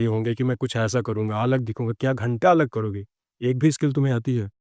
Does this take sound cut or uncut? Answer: uncut